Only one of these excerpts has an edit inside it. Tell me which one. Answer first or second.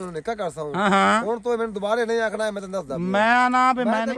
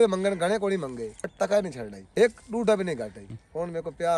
second